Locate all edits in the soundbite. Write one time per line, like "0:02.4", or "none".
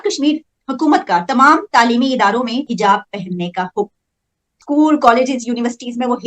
0:02.7